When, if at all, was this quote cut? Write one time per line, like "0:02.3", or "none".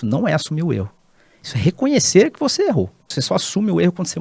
0:03.1